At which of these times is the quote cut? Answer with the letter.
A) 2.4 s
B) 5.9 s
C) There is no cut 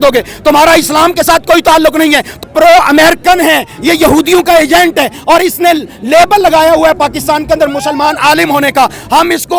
A